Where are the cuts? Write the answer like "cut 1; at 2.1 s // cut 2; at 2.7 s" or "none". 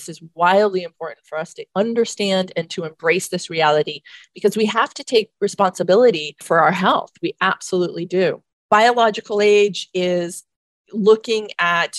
cut 1; at 6.3 s // cut 2; at 8.5 s